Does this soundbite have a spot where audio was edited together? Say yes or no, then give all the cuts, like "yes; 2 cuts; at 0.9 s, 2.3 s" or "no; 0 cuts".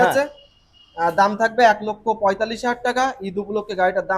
no; 0 cuts